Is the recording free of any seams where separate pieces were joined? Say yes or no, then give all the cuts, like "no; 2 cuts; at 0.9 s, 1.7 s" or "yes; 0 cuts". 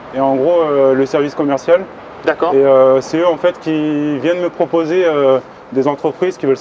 yes; 0 cuts